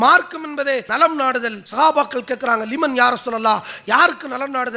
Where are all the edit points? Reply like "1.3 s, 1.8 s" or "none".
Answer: 1.2 s